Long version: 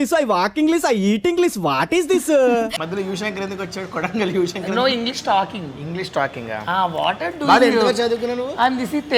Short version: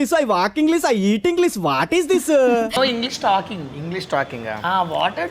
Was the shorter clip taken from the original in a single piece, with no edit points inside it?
no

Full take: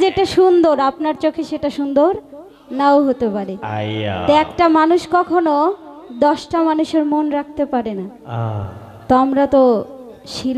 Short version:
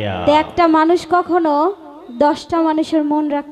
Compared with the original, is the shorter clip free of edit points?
yes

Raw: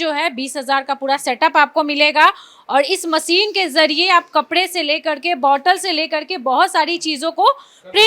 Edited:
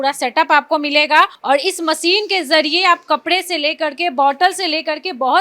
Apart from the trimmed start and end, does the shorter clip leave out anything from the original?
yes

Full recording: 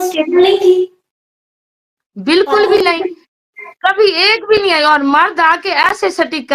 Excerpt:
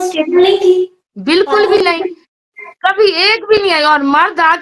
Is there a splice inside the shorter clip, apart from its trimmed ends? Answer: yes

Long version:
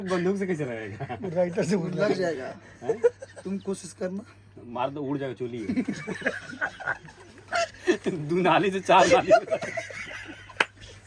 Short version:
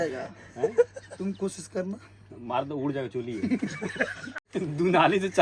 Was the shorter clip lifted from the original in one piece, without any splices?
no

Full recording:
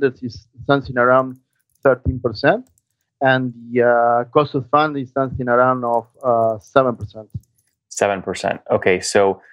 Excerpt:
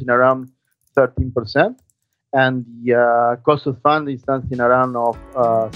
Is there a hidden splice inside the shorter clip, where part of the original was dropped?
no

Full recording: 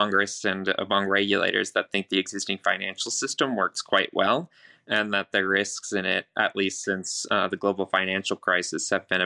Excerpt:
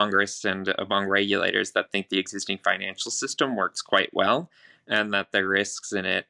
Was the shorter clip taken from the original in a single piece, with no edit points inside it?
yes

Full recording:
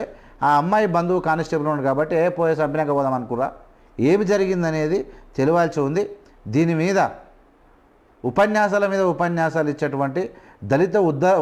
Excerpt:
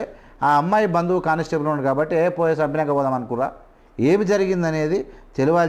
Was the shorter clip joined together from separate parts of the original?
no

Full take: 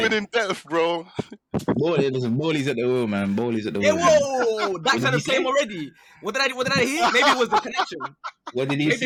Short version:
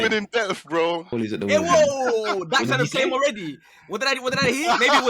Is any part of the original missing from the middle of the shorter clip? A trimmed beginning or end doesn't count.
yes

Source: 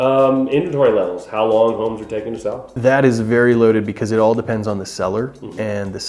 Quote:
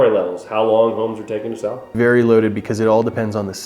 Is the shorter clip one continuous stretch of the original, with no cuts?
no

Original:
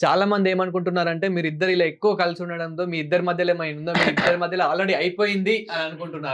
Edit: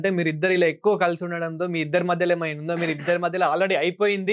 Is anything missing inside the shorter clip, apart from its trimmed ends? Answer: no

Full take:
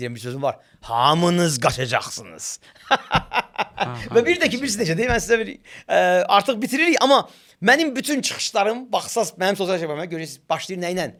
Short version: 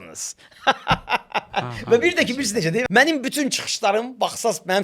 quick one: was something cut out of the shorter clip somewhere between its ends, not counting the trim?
yes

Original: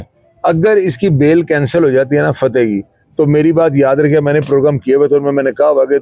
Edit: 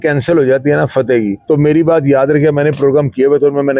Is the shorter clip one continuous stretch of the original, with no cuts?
no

